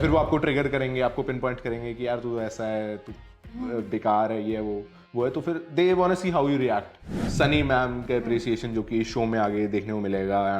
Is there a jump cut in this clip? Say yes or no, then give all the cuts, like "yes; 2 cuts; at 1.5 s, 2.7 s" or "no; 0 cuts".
yes; 1 cut; at 7.2 s